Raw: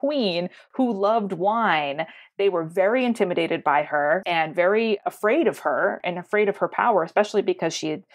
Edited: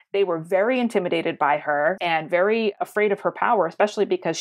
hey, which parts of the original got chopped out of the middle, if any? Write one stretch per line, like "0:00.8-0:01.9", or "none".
0:05.1-0:06.2